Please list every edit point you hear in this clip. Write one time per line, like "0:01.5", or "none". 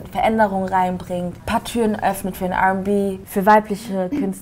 0:01.4
0:03.2

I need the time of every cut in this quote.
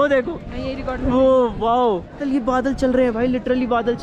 0:02.2

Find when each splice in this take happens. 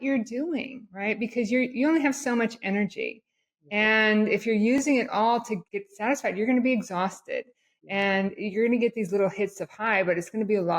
0:05.6

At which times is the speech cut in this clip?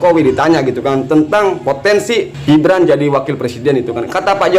0:02.3

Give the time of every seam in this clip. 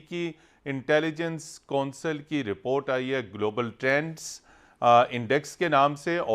none

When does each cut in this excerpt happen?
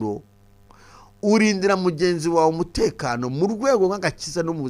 none

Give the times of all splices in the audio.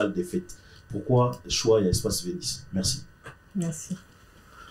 none

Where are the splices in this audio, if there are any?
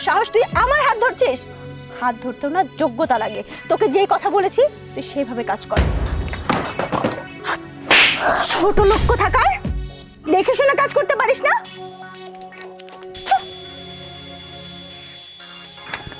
0:06.0

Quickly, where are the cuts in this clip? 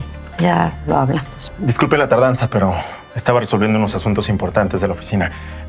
0:01.4

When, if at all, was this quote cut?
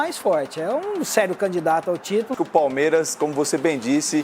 0:02.3

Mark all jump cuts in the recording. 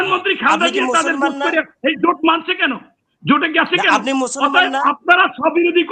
none

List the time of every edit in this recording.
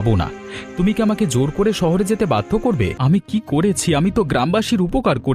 0:03.0

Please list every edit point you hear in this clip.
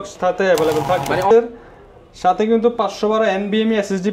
0:01.3

